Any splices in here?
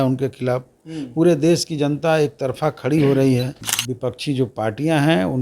yes; 1 cut; at 3.7 s

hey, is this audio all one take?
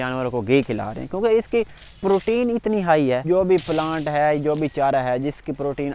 no; 1 cut; at 3.2 s

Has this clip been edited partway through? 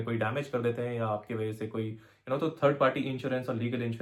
no; 0 cuts

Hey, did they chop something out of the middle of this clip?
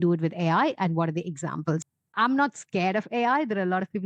yes; 1 cut; at 1.8 s

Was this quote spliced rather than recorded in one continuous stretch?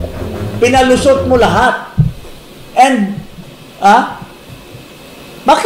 no; 0 cuts

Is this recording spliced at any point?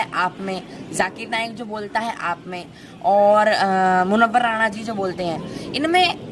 no; 0 cuts

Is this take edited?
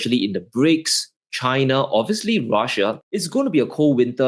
no; 0 cuts

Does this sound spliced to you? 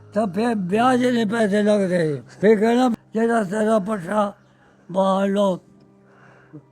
yes; 2 cuts; at 2.4 s, 2.9 s

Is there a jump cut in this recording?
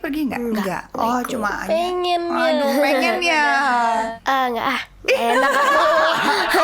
yes; 1 cut; at 4.1 s

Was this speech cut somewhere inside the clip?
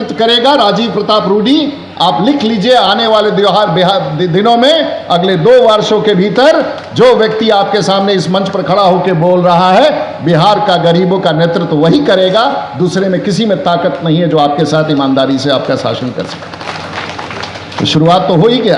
no; 0 cuts

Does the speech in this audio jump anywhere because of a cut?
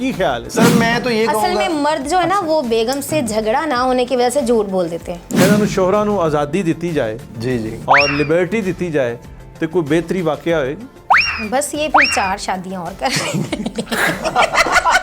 yes; 1 cut; at 5.2 s

